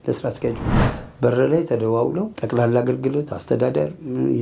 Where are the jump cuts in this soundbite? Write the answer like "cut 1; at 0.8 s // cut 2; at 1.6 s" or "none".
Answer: cut 1; at 2.4 s